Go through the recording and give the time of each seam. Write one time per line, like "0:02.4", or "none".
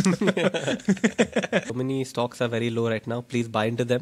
0:01.7